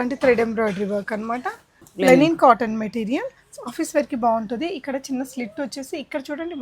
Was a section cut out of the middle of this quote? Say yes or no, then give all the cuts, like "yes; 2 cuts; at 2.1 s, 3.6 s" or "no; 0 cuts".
yes; 1 cut; at 1.9 s